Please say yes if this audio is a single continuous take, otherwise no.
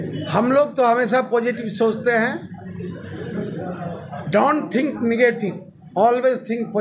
yes